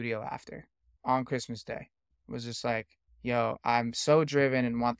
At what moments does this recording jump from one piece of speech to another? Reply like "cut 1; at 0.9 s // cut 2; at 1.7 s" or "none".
cut 1; at 0.9 s // cut 2; at 2.1 s // cut 3; at 3.0 s